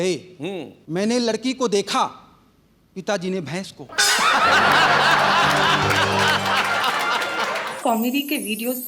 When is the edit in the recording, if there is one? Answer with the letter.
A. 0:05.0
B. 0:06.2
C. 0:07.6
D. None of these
C